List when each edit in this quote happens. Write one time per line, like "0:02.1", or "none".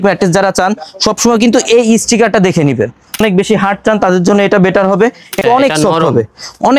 0:03.2
0:05.4